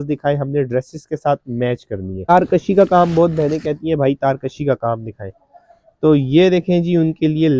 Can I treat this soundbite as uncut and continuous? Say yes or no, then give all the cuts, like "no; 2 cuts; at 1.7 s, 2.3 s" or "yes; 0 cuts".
no; 1 cut; at 2.3 s